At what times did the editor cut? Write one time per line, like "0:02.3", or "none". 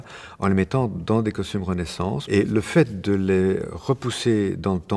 0:02.2

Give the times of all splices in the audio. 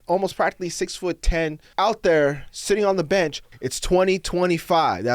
0:01.6
0:03.5

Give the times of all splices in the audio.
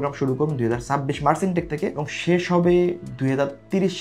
0:02.0

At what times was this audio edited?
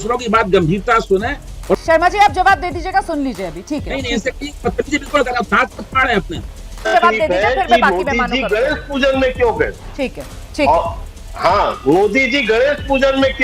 0:01.8
0:06.9

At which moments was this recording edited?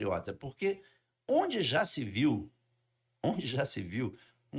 none

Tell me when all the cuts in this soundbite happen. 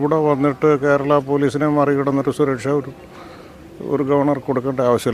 none

